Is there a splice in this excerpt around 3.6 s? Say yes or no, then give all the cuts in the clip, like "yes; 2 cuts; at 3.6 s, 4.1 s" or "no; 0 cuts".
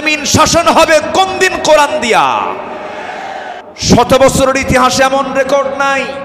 yes; 1 cut; at 3.6 s